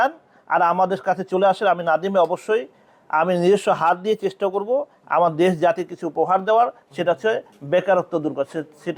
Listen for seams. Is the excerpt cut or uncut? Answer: uncut